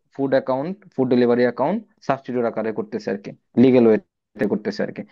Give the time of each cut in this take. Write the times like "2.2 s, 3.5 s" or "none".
none

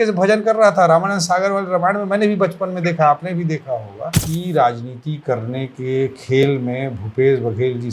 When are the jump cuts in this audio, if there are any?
4.2 s

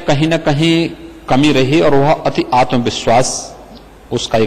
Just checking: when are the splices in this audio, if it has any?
none

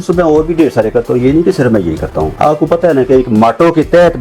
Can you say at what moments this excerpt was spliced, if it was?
2.2 s

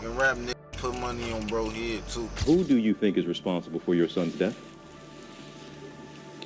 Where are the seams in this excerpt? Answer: 2.3 s

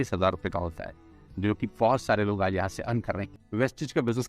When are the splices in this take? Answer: 3.2 s

